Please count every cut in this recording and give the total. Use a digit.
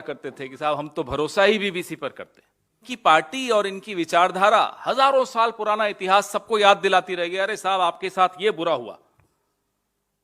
1